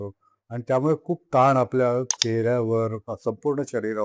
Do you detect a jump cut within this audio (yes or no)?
yes